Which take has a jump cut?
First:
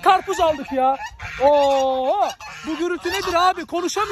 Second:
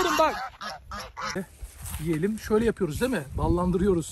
second; 1 cut; at 1.3 s

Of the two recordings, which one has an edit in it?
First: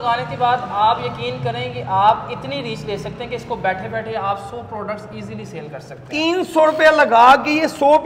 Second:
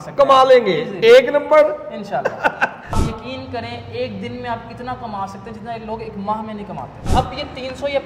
second; 2 cuts; at 3.0 s, 7.1 s

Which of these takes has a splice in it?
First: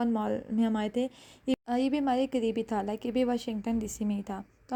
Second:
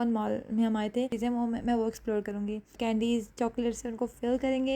second; 2 cuts; at 1.1 s, 2.7 s

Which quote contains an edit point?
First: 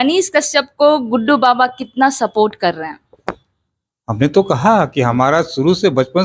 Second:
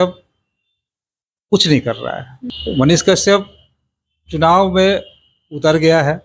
second; 1 cut; at 2.3 s

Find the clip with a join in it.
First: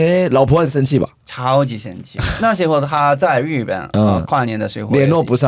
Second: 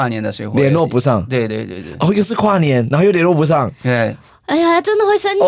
first; 1 cut; at 2.3 s

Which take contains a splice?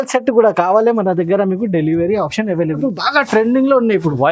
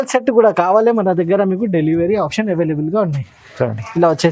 first; 1 cut; at 2.8 s

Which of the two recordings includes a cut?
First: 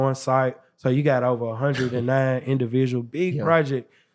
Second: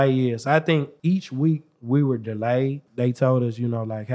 second; 2 cuts; at 0.9 s, 2.8 s

